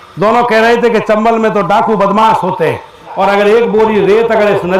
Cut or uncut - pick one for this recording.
cut